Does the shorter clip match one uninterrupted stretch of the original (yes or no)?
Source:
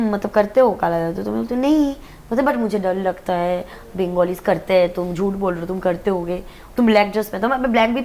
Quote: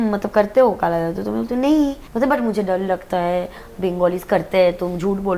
no